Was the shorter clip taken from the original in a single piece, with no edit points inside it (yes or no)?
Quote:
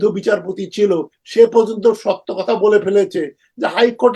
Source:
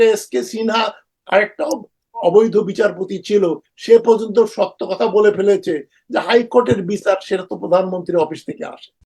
yes